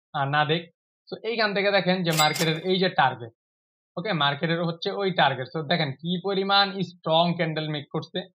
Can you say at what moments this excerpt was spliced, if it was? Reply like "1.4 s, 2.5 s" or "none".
none